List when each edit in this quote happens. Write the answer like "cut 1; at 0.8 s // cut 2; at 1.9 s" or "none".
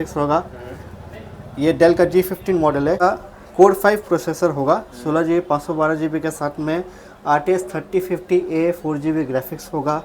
cut 1; at 3.0 s